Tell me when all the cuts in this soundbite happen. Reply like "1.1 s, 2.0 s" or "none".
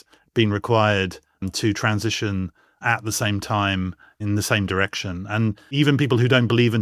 4.2 s, 5.7 s

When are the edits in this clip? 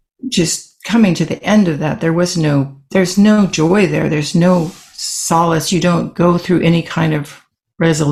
none

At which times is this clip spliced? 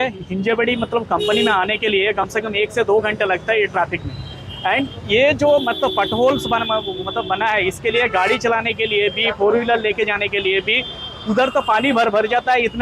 none

